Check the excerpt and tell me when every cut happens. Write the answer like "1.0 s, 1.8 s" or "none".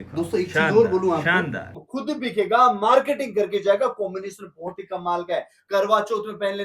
1.7 s